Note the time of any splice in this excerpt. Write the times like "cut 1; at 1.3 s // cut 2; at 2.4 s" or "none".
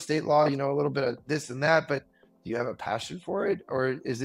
none